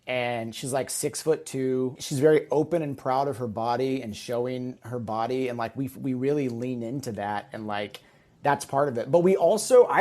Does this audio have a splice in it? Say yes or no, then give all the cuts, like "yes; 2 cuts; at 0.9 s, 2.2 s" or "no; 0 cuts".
yes; 1 cut; at 2.0 s